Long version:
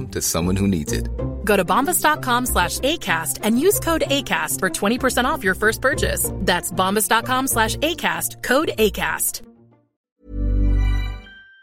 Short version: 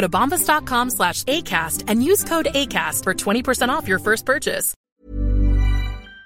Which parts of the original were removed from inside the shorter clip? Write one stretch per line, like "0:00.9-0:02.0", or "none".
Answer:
0:06.3-0:09.9